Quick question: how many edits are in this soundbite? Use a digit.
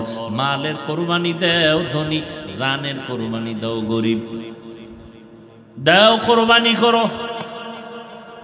0